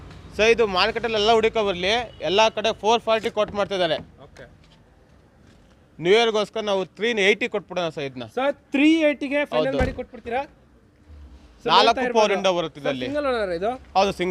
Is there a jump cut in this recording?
no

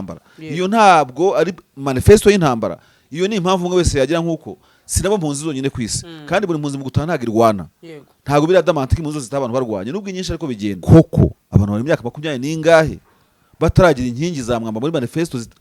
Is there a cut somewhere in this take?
yes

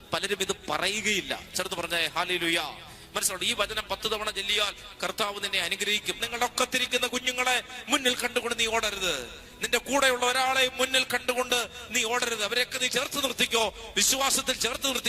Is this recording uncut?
no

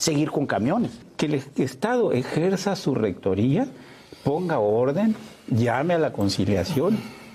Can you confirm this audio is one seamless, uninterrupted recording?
no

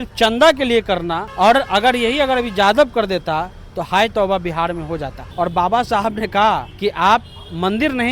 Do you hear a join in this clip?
yes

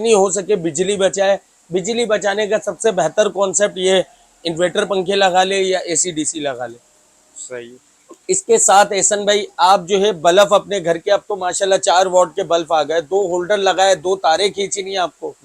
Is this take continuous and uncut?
yes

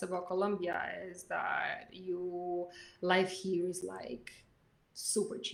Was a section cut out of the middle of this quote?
no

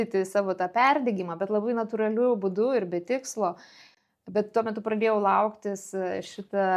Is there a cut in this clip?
no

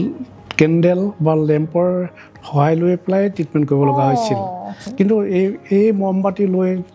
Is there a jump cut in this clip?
yes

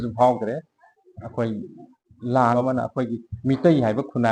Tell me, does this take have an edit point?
yes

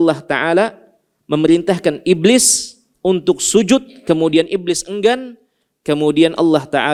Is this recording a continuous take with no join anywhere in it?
yes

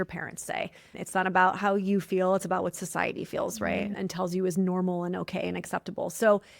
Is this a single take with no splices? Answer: no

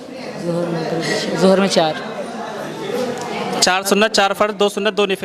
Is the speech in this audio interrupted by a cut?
no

